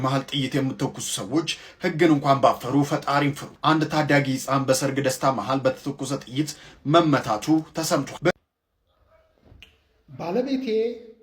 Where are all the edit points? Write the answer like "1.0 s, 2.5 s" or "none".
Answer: 8.3 s